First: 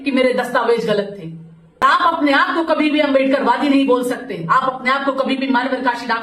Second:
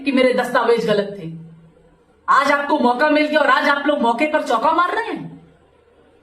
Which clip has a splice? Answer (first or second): first